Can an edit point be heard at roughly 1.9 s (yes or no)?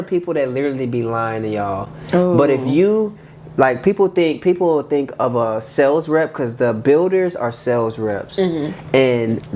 no